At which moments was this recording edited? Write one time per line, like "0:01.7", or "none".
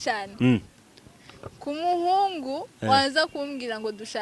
none